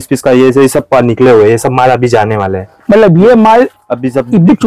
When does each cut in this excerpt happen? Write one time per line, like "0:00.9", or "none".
none